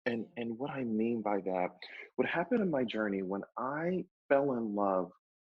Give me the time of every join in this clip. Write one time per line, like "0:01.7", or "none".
0:04.1

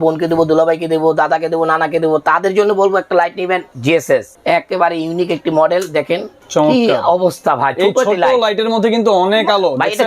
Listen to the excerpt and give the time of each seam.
0:04.0
0:06.4

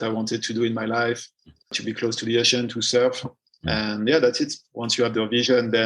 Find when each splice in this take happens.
0:01.5

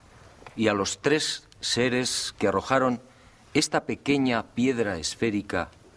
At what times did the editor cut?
0:02.5

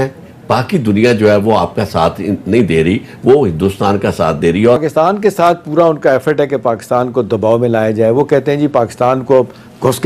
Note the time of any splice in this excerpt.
0:04.8

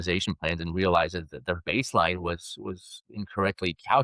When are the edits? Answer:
none

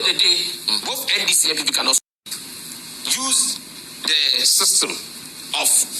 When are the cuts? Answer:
0:02.0

